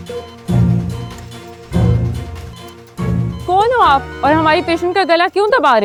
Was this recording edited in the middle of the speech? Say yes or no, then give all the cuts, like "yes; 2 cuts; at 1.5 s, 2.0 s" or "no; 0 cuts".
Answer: no; 0 cuts